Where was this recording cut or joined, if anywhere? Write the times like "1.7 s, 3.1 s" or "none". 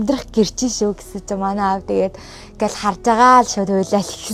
none

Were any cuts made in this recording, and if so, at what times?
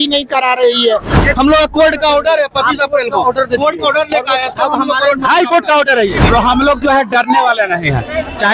1.2 s, 6.2 s

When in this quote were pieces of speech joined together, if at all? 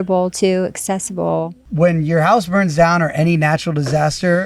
none

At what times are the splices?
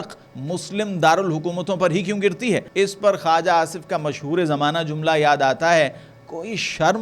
2.7 s

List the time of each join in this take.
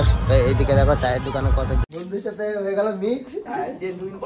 1.8 s

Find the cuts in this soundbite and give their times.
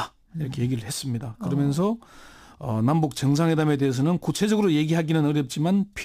none

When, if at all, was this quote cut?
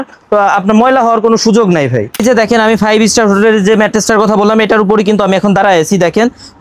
2.1 s

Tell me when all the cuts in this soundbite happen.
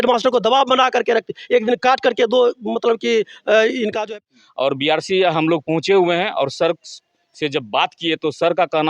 4.0 s

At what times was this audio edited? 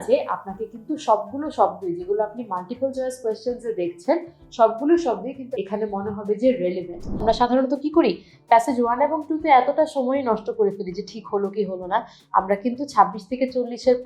5.4 s, 7.2 s

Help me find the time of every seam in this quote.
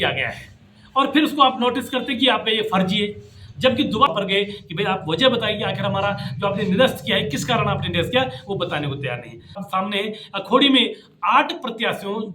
4.1 s, 9.6 s

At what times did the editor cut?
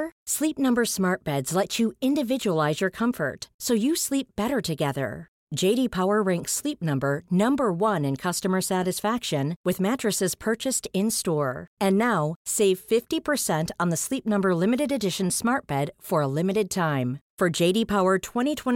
none

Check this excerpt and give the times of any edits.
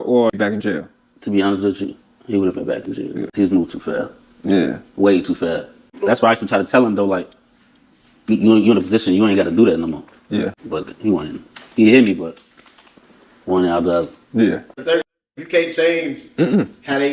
none

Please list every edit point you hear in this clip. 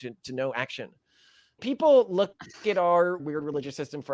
1.7 s, 3.2 s

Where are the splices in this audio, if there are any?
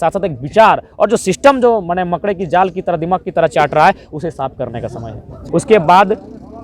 5.3 s

